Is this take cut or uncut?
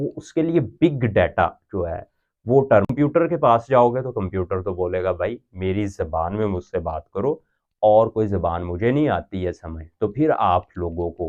cut